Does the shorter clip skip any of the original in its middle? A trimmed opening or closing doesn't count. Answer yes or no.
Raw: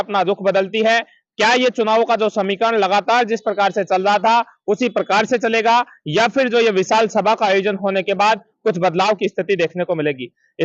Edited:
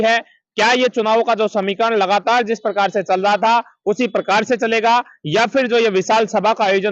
no